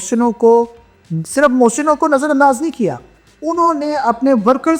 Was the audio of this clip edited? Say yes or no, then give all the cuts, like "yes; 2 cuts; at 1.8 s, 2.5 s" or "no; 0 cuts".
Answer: no; 0 cuts